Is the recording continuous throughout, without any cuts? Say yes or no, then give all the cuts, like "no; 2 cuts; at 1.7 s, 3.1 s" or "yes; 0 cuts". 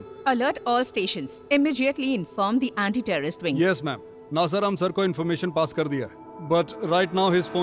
yes; 0 cuts